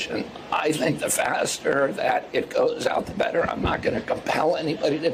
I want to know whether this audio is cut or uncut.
uncut